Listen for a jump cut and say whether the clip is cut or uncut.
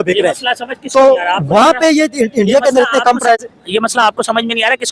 uncut